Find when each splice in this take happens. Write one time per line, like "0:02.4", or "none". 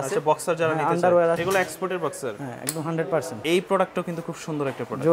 0:01.4
0:03.4